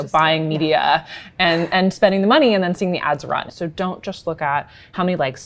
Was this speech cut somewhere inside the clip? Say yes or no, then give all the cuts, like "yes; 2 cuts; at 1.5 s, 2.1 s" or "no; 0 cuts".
yes; 1 cut; at 3.5 s